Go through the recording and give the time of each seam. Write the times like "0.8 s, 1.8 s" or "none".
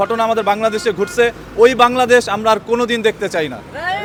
none